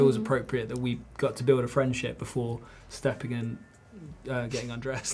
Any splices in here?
no; 0 cuts

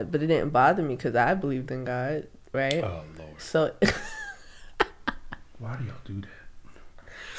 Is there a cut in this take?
no; 0 cuts

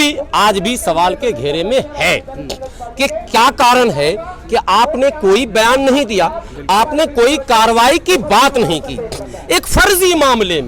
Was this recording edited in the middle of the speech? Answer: no; 0 cuts

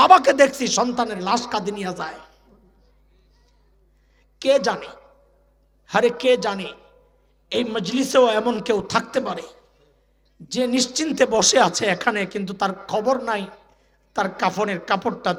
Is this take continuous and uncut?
yes; 0 cuts

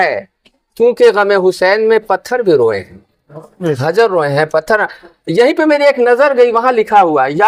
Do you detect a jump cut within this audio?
no; 0 cuts

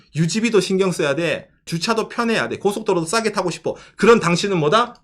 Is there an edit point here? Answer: yes; 1 cut; at 1.7 s

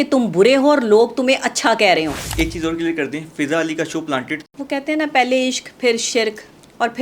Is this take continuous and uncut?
no; 2 cuts; at 2.2 s, 4.5 s

